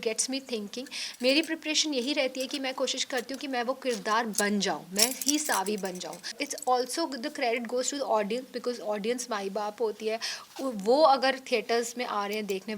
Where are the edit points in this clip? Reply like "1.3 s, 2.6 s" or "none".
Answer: 6.4 s